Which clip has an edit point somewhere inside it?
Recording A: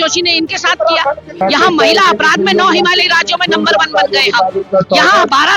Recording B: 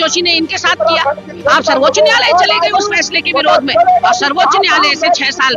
A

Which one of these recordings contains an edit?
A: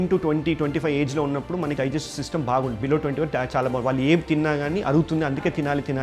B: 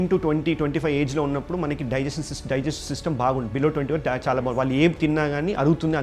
A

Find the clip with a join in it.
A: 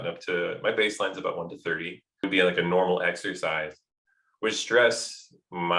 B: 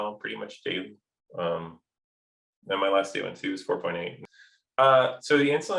A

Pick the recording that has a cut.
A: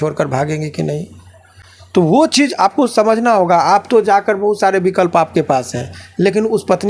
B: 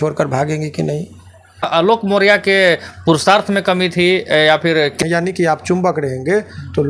B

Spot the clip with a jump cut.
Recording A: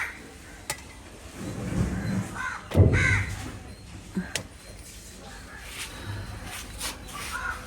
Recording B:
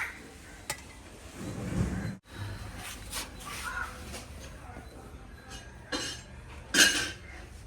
B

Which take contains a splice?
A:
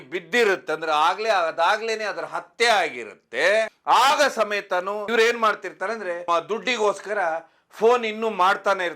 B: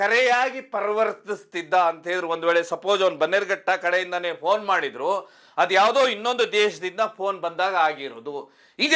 A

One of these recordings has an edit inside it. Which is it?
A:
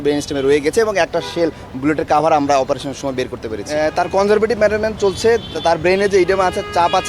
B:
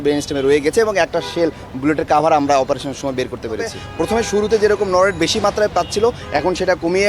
B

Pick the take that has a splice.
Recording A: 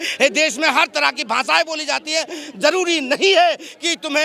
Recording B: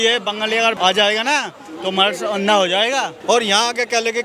B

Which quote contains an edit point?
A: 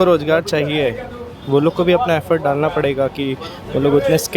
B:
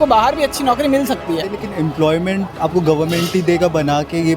B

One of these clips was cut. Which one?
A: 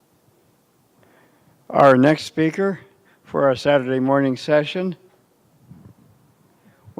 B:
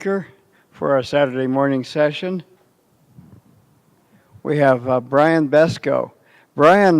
B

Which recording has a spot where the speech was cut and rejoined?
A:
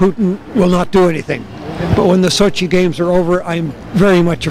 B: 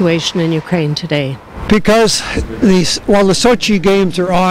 B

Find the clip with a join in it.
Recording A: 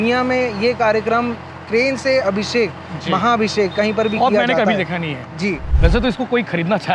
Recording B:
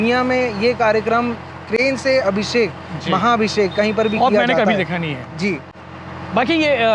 A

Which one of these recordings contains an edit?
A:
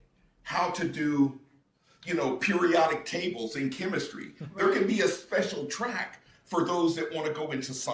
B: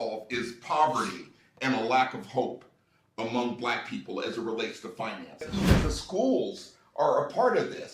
B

